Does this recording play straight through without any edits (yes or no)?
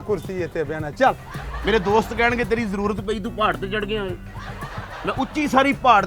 no